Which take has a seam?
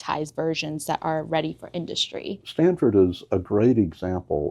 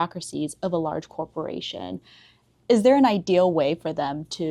first; 1 cut; at 2.4 s

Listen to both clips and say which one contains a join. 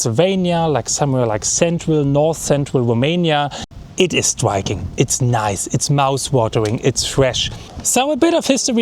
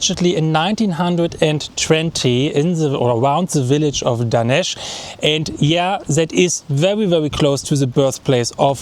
first; 2 cuts; at 3.7 s, 7.7 s

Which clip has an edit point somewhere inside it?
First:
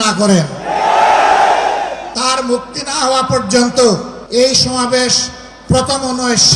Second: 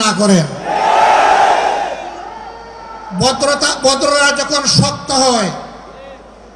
first; 2 cuts; at 2.1 s, 4.2 s

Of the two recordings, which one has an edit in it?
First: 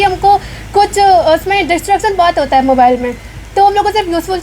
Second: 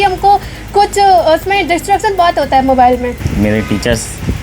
second; 1 cut; at 3.2 s

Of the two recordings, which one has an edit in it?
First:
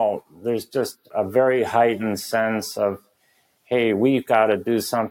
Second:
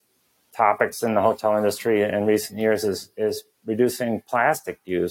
first; 1 cut; at 1.1 s

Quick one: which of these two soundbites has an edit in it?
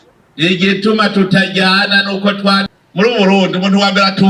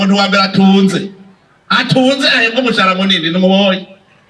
first; 1 cut; at 2.7 s

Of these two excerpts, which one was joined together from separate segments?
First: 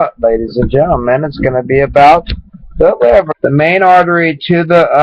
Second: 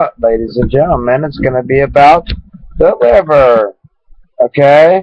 second; 1 cut; at 3.3 s

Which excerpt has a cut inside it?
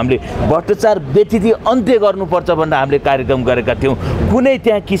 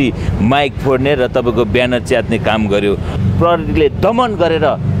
second; 1 cut; at 3.2 s

